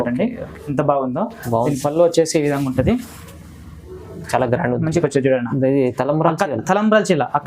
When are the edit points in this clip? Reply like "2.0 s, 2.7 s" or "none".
5.0 s